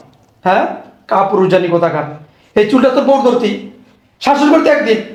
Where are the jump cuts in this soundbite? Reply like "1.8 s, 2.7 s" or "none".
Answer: none